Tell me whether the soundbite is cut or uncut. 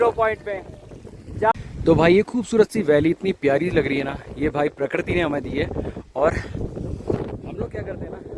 cut